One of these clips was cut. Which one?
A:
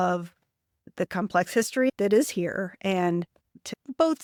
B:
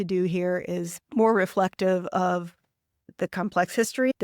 B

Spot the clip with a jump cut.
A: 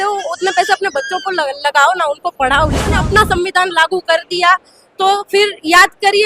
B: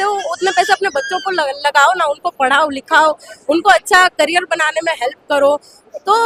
A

